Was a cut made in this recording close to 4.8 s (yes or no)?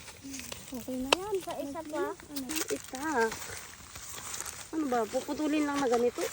no